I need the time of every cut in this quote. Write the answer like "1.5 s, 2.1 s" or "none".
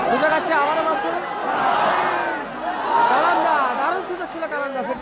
none

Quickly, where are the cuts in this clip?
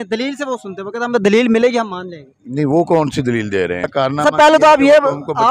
3.9 s

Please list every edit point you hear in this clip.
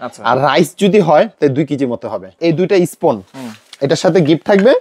2.3 s

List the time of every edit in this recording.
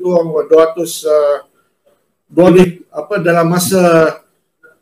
2.5 s

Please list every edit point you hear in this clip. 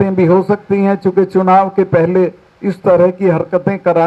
none

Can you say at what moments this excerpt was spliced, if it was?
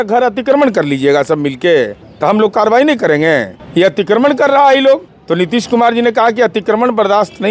2.0 s, 3.6 s, 5.1 s

